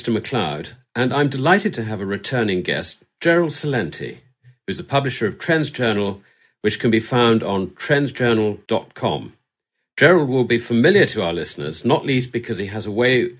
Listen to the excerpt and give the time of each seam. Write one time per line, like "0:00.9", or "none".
none